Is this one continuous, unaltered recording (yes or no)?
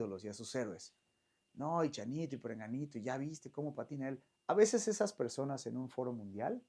yes